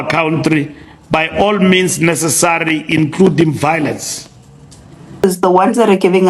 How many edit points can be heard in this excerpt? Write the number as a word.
one